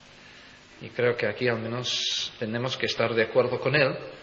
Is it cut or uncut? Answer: uncut